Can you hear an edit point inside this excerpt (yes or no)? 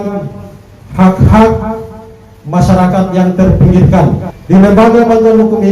yes